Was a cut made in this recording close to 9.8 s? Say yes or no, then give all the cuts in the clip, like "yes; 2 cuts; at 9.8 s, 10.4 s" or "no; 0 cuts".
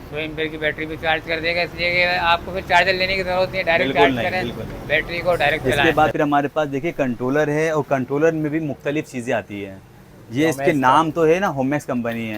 no; 1 cut; at 5.7 s